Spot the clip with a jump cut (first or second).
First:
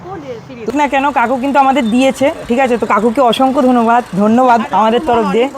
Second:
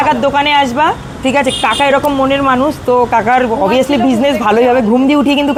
first